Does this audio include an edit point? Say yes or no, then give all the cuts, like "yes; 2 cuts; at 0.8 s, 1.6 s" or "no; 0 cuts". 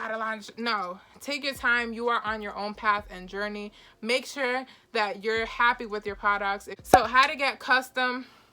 no; 0 cuts